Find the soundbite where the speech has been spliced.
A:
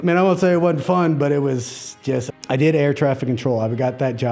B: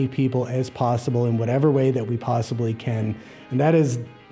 A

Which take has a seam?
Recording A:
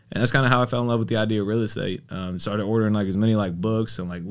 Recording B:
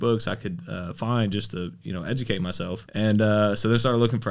B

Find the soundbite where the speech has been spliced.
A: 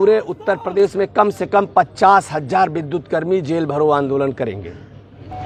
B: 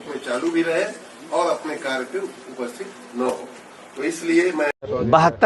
B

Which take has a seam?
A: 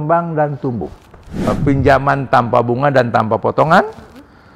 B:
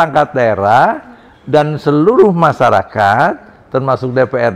A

